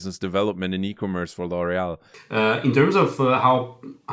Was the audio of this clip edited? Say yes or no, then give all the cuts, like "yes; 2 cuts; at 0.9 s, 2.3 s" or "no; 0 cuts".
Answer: yes; 1 cut; at 2.1 s